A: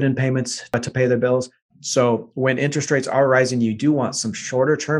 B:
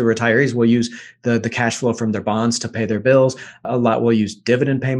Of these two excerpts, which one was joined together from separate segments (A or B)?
A